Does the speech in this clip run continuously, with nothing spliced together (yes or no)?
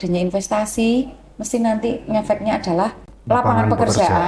no